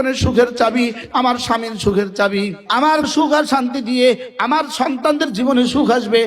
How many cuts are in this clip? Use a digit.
2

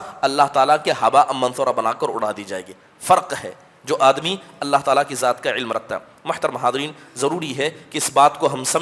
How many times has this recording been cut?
0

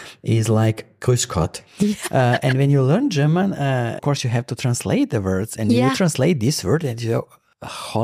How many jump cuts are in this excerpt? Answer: 1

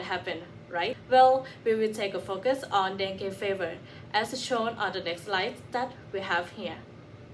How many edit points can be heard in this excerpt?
1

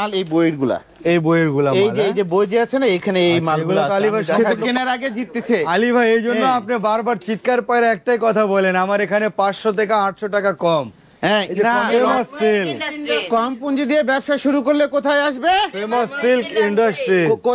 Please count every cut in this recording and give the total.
2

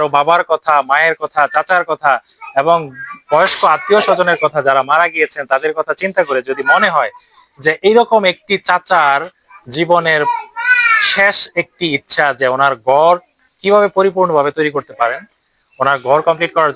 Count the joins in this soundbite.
0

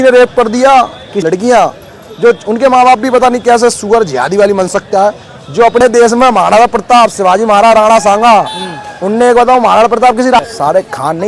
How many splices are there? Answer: 3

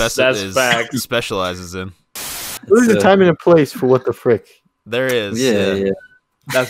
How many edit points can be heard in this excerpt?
1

